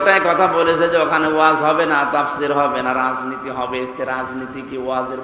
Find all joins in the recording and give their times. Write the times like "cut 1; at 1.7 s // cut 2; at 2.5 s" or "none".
none